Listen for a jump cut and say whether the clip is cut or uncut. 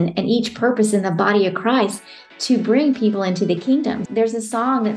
cut